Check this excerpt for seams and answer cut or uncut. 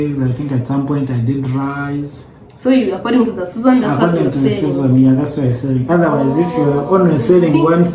uncut